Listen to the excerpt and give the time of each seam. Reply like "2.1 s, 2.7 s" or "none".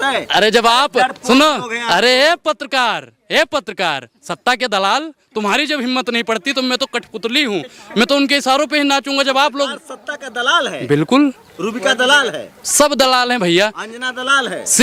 none